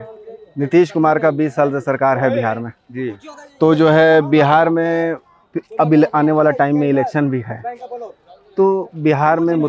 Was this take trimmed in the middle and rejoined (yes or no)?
no